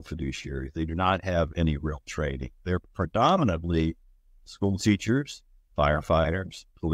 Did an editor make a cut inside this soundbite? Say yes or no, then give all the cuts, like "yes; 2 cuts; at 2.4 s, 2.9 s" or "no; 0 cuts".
no; 0 cuts